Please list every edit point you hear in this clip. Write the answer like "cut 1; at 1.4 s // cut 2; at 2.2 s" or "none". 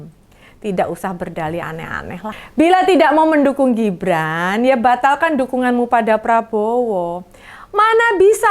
cut 1; at 2.4 s

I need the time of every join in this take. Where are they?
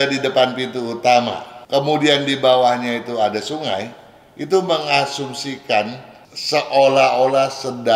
cut 1; at 1.5 s

